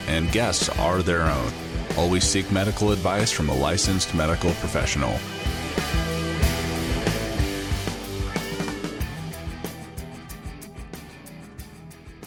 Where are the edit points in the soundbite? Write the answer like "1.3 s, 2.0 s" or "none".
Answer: none

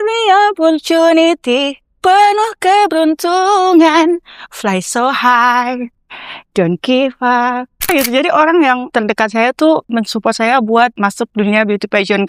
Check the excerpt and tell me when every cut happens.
7.9 s, 8.9 s, 9.9 s, 11.0 s

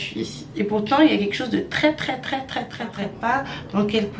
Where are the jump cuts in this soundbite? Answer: 3.0 s

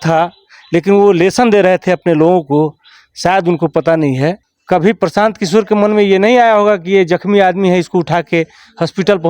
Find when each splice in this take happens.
4.5 s

